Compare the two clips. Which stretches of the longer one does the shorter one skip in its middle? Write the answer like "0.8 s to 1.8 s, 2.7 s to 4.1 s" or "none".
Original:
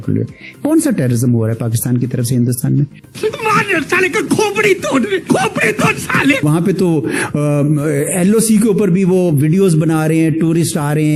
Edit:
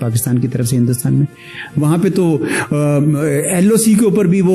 3.3 s to 6.4 s